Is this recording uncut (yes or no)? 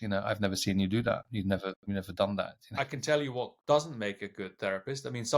no